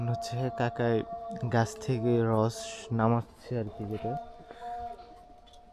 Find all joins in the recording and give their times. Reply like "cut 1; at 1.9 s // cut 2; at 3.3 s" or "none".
cut 1; at 4.1 s